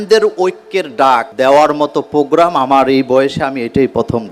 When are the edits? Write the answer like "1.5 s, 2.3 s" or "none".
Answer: 1.3 s